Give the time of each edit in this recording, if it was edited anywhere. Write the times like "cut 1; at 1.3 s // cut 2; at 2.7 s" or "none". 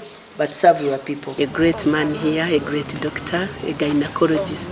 cut 1; at 1.3 s